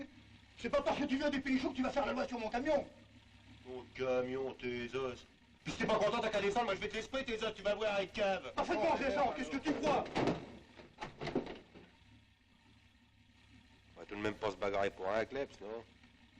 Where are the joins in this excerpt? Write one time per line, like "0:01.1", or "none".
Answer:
0:04.2